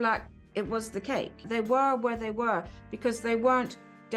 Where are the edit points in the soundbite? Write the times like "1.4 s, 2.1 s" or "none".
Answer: 1.4 s